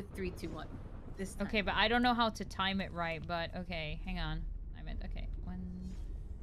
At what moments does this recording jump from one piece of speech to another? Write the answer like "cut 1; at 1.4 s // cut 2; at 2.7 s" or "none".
cut 1; at 4.8 s